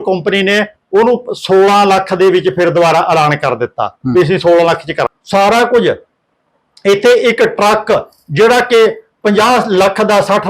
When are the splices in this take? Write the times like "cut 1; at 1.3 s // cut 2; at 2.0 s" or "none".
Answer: cut 1; at 5.1 s